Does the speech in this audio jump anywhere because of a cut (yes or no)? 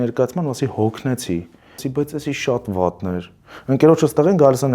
yes